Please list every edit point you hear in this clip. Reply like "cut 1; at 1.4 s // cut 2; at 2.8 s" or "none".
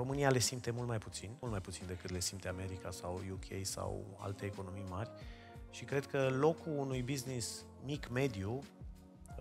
cut 1; at 1.2 s